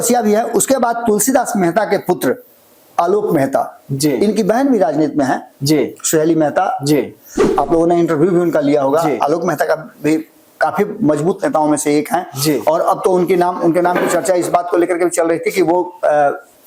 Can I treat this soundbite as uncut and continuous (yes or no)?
yes